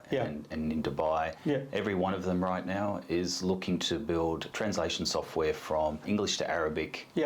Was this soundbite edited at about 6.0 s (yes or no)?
yes